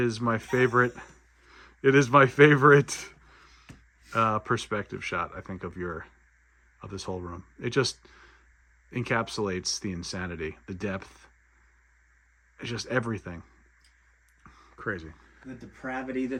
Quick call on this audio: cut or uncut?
uncut